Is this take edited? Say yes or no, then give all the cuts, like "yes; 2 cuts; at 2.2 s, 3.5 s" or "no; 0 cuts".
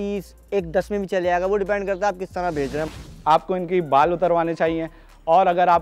yes; 1 cut; at 2.9 s